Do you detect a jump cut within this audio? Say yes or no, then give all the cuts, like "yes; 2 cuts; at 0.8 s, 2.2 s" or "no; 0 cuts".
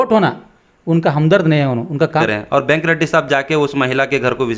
yes; 1 cut; at 2.3 s